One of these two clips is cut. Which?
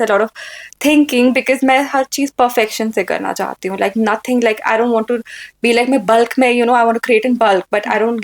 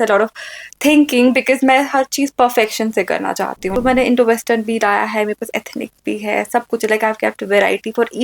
second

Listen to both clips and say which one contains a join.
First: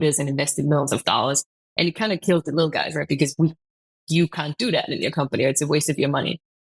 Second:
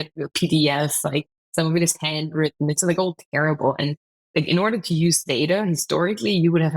second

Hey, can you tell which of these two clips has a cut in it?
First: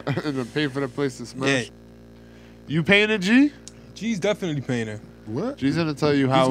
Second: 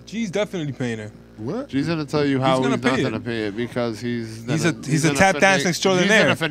first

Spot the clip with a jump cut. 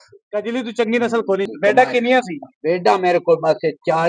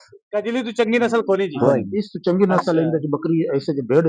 first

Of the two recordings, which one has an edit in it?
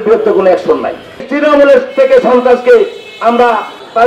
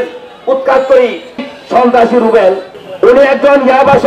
first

